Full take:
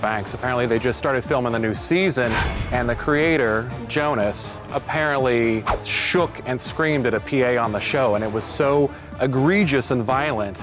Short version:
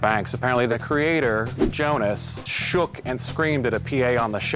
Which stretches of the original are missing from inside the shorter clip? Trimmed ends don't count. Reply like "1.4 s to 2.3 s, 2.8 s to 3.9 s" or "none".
0.7 s to 2.9 s, 4.7 s to 5.9 s